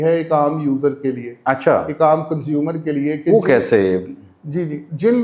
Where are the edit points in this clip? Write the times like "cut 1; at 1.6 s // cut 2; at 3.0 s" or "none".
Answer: none